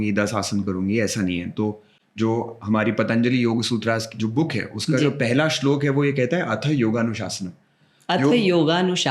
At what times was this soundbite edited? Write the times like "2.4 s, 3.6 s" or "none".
none